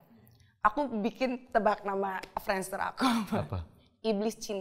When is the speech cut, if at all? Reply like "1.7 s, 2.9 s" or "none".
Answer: none

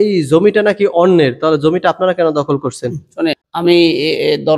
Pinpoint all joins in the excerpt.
3.4 s

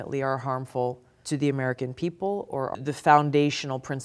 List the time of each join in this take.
1.1 s, 2.8 s

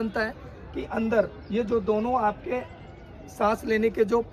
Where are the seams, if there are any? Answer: none

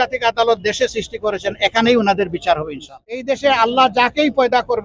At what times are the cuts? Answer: 3.2 s

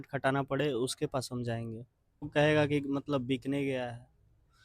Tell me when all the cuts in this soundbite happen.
2.3 s

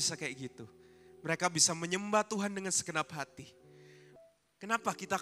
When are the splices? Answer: 4.1 s

